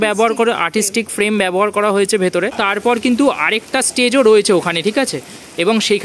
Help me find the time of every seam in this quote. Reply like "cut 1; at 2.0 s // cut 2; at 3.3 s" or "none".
cut 1; at 2.6 s

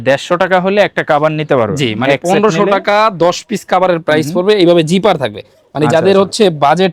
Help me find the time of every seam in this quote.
none

